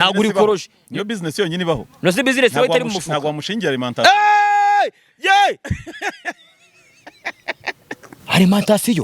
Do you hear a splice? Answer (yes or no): yes